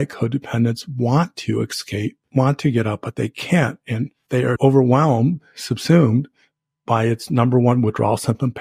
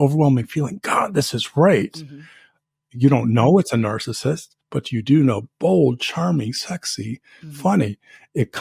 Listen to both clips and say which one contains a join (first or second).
first